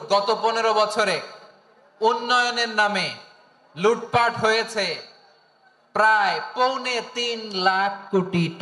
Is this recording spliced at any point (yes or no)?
no